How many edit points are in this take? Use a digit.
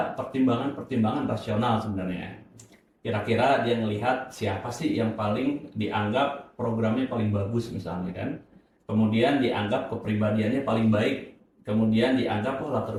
0